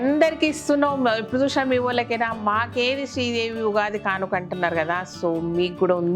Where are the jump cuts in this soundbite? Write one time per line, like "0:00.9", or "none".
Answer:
none